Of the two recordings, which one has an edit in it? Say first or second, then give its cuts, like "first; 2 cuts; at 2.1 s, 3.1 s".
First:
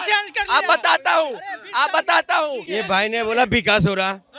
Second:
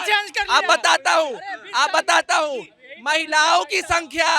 first; 1 cut; at 2.6 s